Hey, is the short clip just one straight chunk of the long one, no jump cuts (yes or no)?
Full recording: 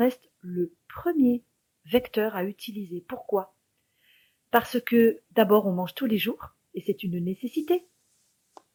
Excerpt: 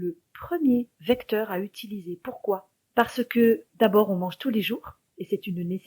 no